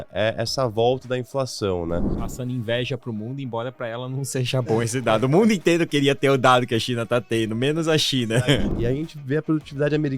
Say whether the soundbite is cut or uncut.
cut